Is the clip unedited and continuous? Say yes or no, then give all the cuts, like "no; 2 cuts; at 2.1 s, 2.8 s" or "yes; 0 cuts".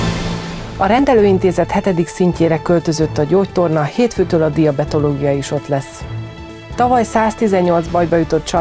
no; 1 cut; at 1.0 s